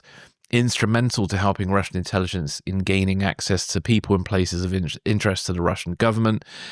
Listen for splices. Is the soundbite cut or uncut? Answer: uncut